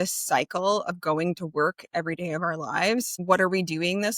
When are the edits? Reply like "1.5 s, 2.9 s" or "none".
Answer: 3.1 s

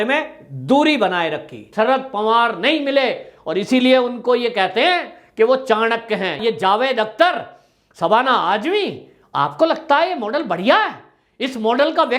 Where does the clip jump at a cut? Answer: 1.6 s, 6.3 s

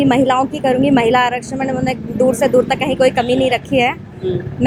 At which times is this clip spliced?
none

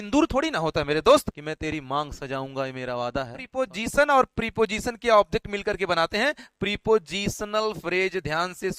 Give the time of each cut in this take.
1.4 s, 3.6 s

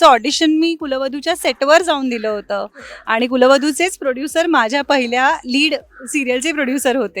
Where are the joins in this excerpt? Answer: none

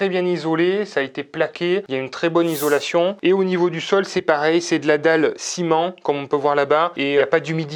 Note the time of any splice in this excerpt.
none

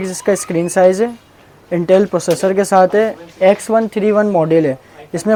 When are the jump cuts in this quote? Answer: none

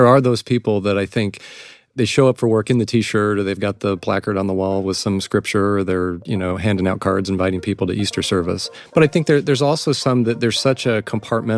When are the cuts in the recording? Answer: 8.7 s

